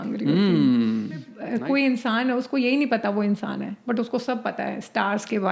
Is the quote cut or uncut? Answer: cut